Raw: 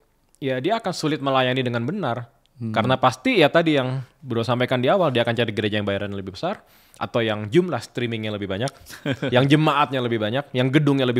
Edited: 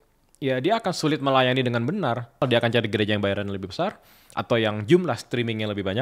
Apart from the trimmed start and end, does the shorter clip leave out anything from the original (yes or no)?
yes